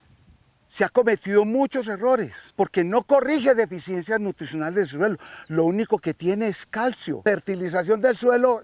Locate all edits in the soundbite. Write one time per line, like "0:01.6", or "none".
0:02.4
0:07.1

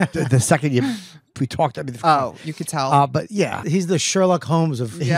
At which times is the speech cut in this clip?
0:03.6

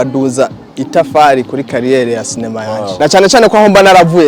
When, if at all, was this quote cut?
0:02.9

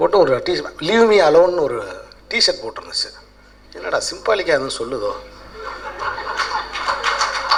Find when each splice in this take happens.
none

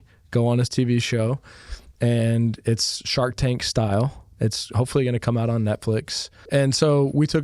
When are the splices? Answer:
0:04.2
0:06.4

